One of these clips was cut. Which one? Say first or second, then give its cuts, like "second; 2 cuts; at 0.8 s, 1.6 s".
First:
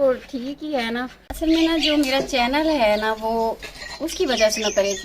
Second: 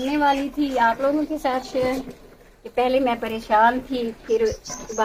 first; 1 cut; at 1.2 s